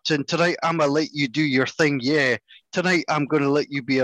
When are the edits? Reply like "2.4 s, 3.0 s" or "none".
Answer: none